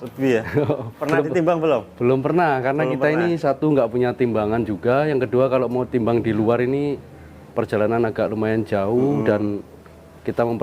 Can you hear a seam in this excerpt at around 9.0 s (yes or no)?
no